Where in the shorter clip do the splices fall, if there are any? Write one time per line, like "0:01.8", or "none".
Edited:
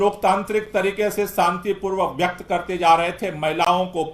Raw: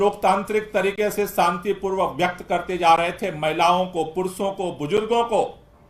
none